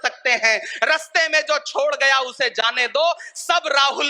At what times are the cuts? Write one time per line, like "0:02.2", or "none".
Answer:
none

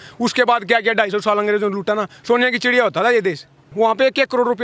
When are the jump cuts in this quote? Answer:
0:03.6

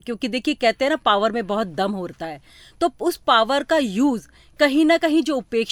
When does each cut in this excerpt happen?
none

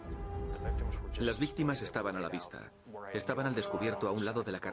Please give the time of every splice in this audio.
0:03.8

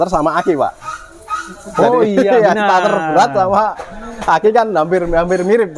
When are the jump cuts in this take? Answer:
none

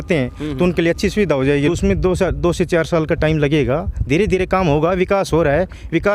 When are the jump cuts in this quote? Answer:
0:01.7

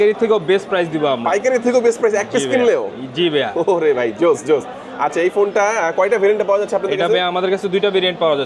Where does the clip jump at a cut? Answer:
none

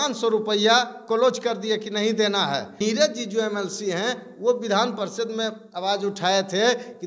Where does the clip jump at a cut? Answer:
0:02.7

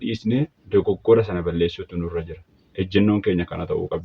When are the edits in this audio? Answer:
none

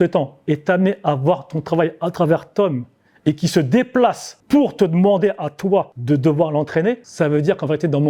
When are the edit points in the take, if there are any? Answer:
0:04.3
0:05.9
0:07.1

